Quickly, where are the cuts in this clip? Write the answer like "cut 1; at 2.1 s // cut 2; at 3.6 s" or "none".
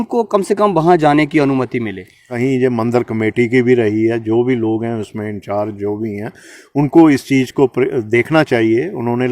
cut 1; at 2.3 s